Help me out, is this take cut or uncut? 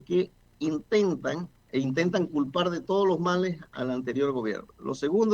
cut